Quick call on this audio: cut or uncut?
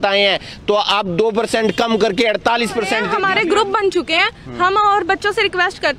cut